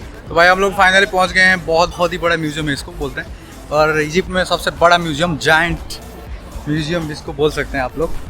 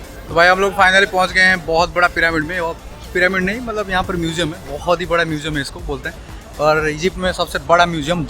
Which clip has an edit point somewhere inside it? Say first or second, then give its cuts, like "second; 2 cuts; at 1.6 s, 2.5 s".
first; 1 cut; at 1.9 s